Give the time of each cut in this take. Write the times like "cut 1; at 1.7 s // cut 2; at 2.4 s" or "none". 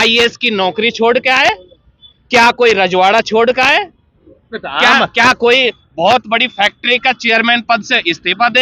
none